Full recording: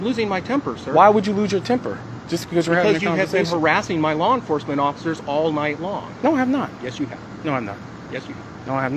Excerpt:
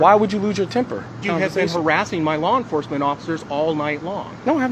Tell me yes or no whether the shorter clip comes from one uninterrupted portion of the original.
no